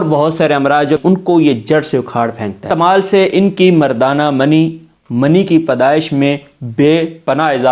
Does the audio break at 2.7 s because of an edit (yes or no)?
yes